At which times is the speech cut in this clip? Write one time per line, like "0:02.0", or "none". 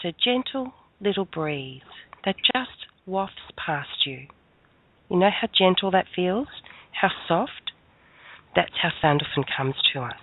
none